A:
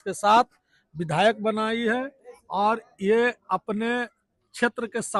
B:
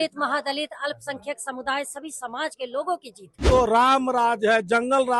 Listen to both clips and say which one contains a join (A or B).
B